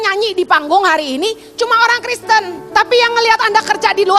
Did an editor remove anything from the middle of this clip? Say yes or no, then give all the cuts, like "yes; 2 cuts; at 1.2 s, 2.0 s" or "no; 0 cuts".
yes; 1 cut; at 2.6 s